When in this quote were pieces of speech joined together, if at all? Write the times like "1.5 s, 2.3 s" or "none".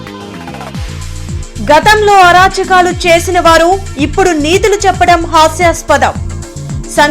1.4 s